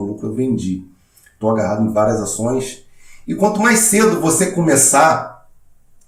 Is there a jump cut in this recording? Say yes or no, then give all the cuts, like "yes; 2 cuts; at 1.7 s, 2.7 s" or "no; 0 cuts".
no; 0 cuts